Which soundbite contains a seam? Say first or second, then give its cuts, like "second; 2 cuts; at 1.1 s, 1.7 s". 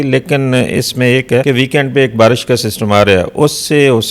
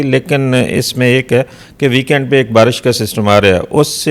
first; 1 cut; at 1.4 s